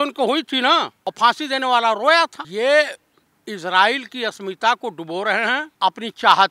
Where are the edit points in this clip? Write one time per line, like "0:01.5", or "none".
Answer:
0:01.0
0:02.4
0:05.7